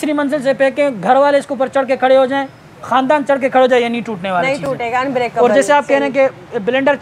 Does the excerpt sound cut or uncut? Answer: uncut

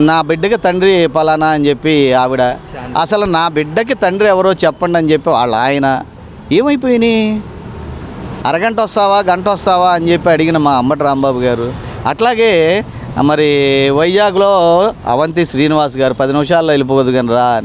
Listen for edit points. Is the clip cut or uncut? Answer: uncut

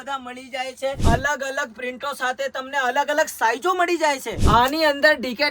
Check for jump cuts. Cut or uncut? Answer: cut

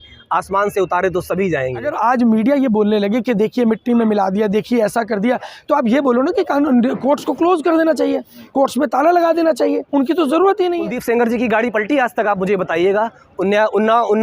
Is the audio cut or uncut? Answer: cut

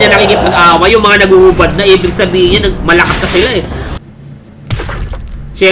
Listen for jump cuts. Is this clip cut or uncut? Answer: cut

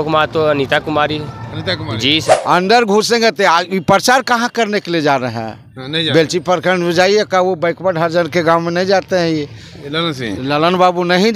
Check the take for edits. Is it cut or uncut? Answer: cut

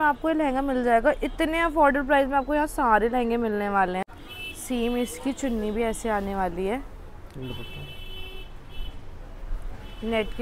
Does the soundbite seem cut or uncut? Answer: uncut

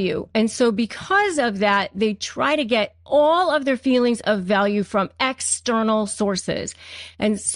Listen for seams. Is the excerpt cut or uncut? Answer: uncut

